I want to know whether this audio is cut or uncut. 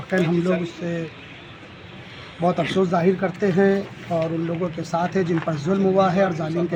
uncut